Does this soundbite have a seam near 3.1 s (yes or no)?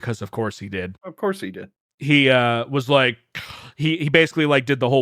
no